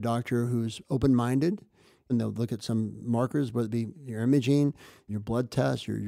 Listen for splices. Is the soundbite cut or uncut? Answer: cut